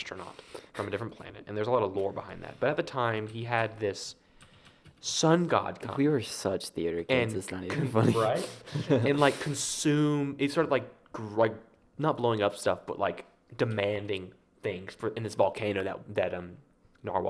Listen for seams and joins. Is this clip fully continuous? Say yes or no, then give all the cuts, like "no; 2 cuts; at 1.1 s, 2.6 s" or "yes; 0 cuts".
yes; 0 cuts